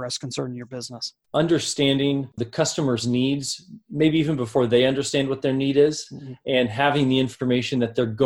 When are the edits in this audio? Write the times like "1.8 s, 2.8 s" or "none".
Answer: 1.2 s, 2.4 s